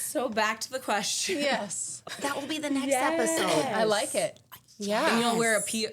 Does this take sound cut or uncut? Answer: cut